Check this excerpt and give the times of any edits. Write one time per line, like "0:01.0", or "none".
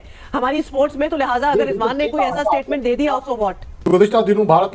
0:03.7